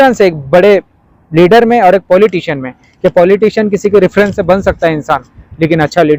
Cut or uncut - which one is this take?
uncut